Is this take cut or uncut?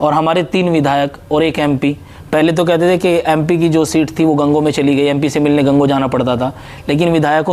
uncut